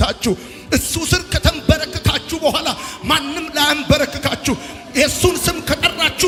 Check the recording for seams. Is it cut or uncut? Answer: uncut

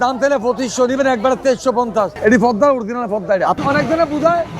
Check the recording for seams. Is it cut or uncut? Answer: cut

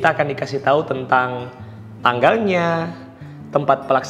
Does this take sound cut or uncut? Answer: uncut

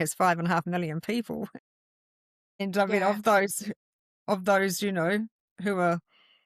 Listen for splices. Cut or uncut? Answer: uncut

